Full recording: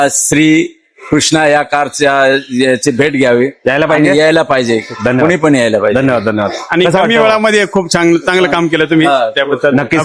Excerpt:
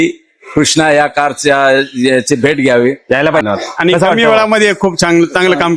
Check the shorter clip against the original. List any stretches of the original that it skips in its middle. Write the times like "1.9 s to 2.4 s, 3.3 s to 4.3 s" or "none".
4.0 s to 6.3 s